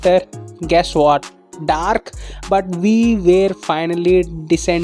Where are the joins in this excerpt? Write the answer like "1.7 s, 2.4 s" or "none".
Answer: none